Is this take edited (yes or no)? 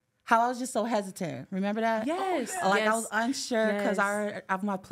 no